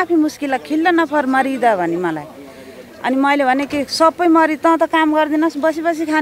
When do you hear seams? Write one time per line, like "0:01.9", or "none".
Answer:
none

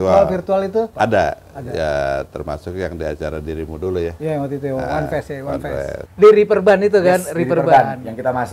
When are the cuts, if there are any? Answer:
0:00.9
0:06.0

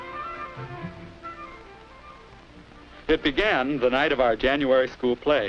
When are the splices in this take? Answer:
0:01.7

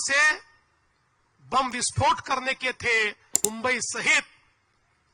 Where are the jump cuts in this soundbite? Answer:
0:03.4

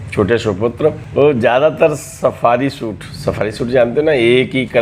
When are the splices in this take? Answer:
0:01.0

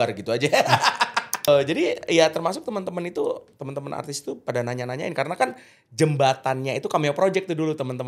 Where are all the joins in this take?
0:01.5

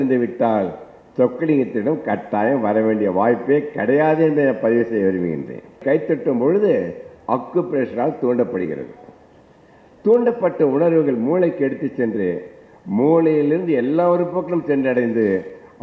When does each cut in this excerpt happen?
0:05.8

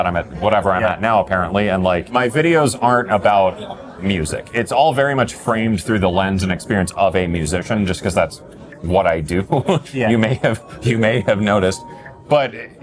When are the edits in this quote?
none

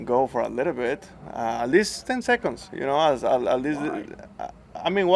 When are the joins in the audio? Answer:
none

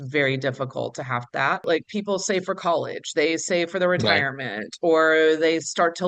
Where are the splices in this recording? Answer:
0:01.6

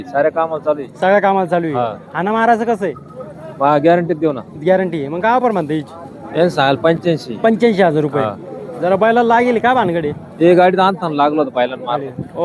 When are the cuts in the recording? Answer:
none

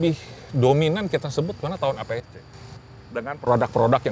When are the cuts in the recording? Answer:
none

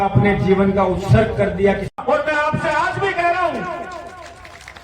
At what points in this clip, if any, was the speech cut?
0:01.9

